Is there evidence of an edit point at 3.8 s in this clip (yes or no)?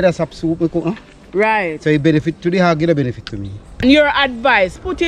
yes